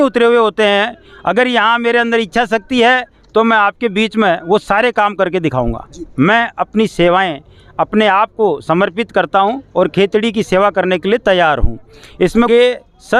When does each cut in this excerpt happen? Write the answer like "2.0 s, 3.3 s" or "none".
6.2 s, 12.5 s